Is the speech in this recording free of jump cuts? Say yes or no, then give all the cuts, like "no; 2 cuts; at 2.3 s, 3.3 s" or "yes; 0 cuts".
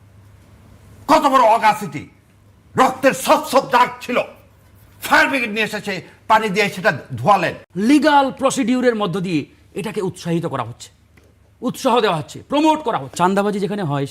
no; 2 cuts; at 7.6 s, 13.1 s